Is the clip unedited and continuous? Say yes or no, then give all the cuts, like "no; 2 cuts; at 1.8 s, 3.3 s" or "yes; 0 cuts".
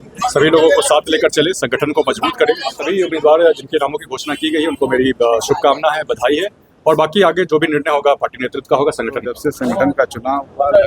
no; 2 cuts; at 2.9 s, 9.5 s